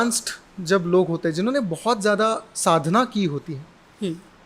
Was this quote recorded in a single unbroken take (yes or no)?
yes